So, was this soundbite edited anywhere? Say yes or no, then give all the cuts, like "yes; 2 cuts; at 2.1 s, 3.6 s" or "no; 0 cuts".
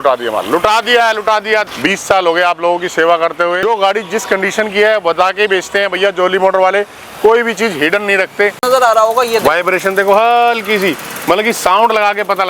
yes; 3 cuts; at 1.7 s, 3.6 s, 8.6 s